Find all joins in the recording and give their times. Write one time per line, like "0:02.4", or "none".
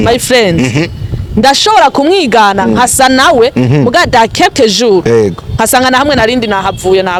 none